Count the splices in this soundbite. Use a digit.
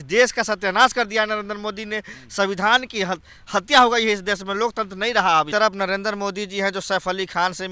1